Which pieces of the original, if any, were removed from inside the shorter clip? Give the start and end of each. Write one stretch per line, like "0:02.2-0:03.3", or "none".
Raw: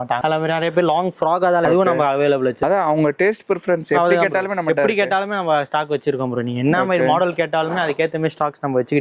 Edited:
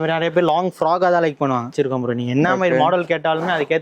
0:01.7-0:05.5